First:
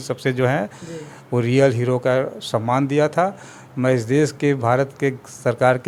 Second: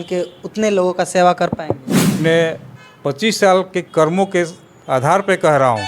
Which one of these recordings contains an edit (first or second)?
second